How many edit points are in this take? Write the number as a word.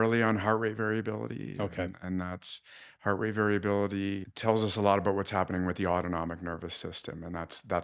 one